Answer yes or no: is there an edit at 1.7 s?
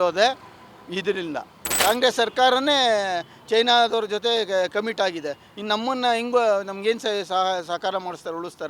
yes